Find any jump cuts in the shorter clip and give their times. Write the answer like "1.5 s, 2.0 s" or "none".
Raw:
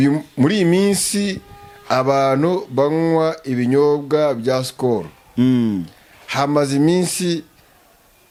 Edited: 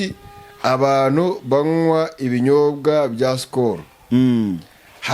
none

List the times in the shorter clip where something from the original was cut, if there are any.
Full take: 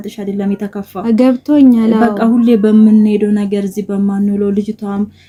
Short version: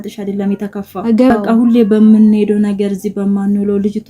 1.3 s

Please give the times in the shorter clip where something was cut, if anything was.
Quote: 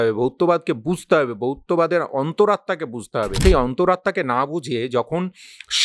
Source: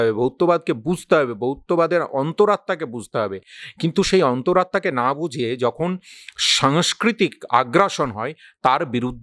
3.4 s

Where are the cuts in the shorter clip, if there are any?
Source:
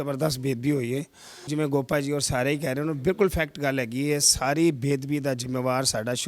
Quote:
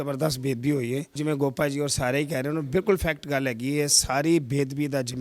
1.1 s

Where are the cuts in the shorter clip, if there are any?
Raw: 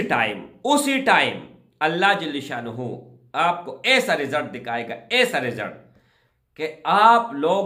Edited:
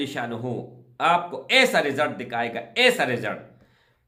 none

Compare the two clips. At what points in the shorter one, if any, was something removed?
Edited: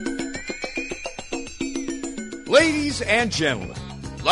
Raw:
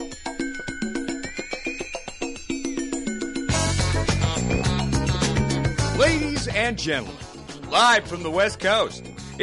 2.5 s

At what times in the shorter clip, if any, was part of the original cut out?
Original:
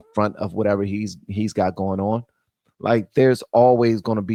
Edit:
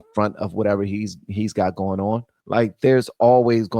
2.3 s

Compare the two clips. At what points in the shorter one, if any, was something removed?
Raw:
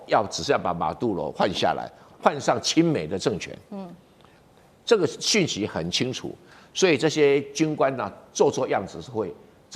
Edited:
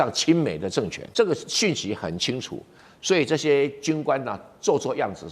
1.0 s

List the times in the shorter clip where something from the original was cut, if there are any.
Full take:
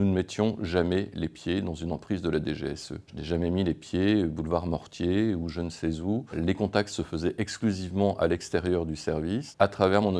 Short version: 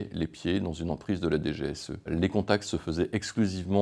2.0 s

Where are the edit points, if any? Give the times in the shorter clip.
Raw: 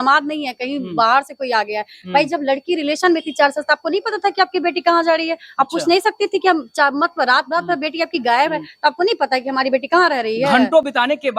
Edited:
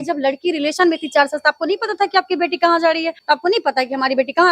3.2 s

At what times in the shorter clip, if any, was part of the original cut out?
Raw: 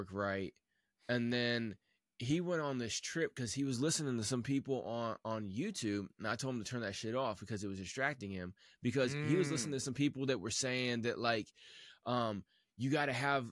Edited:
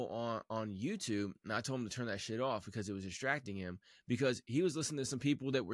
none

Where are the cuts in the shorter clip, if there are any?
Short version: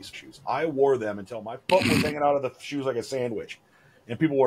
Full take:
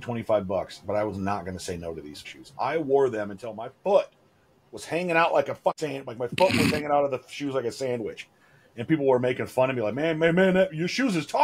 1.5 s

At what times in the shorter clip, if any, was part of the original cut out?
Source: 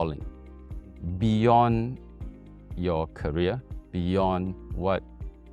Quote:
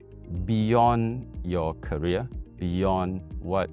1.3 s

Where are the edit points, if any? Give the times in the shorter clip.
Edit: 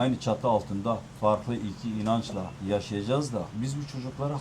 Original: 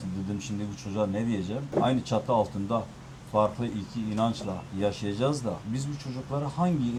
1.1 s

